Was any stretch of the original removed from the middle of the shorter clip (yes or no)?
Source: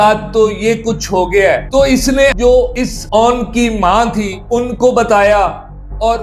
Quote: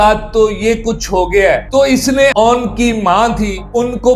yes